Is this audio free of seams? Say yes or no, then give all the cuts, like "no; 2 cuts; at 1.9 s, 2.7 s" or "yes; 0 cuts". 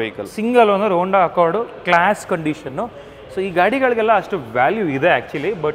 yes; 0 cuts